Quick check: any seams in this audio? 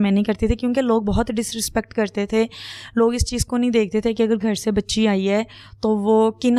no; 0 cuts

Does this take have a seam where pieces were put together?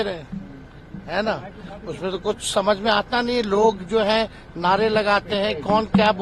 no; 0 cuts

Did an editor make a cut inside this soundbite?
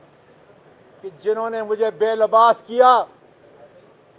no; 0 cuts

